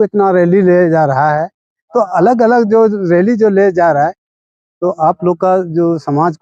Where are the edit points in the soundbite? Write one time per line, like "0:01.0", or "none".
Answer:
none

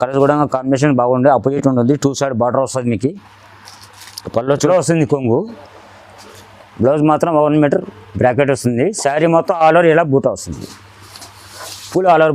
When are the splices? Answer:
0:04.7

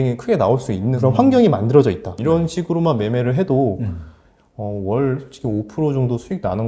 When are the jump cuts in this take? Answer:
0:01.0
0:02.2

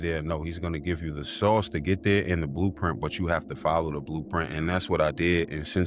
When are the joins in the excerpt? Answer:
none

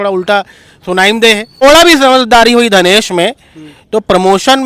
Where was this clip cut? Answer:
0:01.6

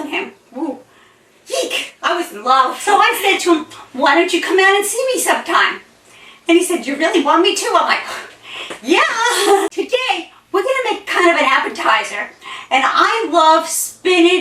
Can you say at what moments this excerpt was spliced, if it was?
0:02.8
0:09.7

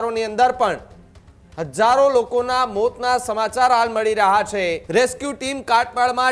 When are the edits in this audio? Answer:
0:04.8

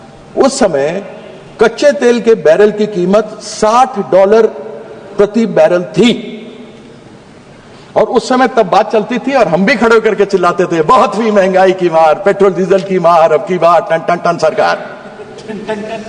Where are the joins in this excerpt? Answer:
none

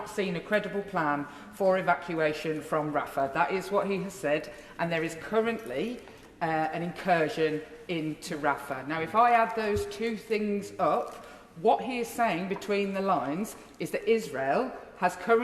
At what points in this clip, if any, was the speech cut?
none

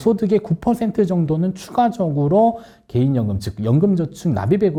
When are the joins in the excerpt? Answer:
none

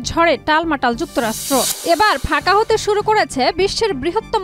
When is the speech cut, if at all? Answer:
0:01.7

